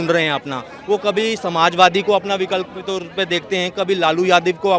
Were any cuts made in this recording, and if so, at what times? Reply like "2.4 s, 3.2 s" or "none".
none